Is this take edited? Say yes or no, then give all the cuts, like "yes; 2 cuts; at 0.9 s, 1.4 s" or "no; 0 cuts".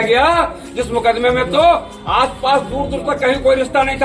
no; 0 cuts